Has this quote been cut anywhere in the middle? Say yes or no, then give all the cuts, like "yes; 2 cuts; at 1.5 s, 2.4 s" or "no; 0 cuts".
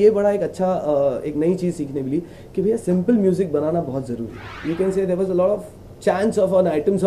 no; 0 cuts